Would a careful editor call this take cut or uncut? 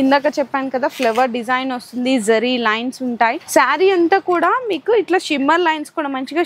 cut